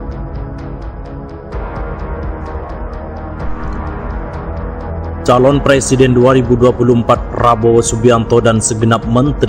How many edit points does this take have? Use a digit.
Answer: 0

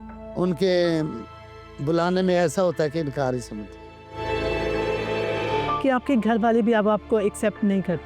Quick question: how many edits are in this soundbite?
1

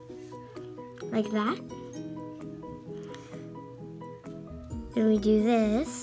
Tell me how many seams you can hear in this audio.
2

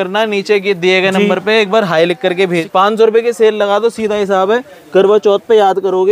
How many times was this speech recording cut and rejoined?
1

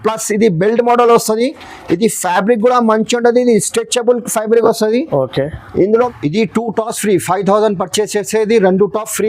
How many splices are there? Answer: 1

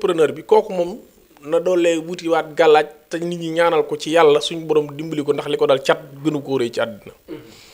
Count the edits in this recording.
0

